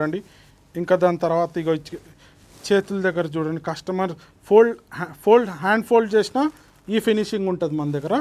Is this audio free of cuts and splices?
yes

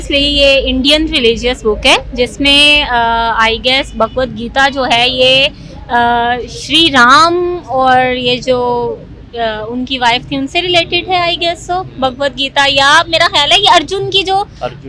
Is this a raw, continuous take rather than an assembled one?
yes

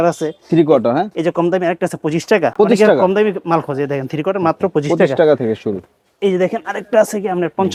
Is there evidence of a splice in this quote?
no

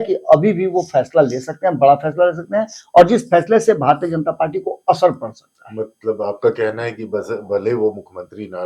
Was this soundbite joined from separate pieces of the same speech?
no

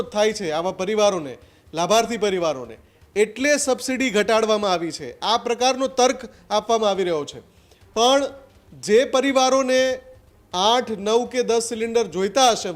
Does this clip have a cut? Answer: no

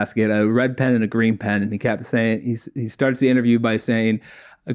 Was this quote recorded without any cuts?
yes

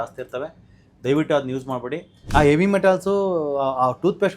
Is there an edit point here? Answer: yes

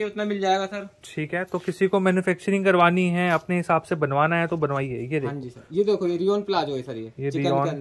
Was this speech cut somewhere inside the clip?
no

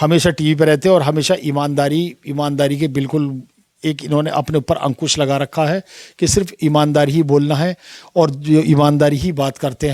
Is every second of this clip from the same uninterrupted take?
yes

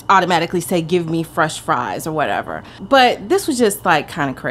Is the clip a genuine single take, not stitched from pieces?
yes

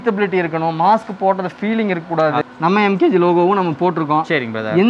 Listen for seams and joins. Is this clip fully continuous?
no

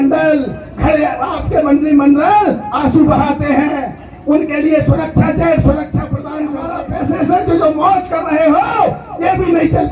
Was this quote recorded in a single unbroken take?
no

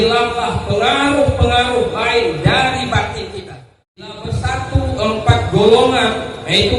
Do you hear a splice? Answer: yes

